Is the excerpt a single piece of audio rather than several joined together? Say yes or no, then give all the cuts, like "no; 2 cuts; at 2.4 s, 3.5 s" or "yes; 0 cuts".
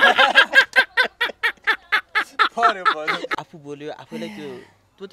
no; 1 cut; at 3.3 s